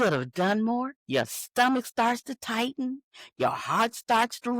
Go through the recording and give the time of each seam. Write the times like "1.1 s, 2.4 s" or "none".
1.0 s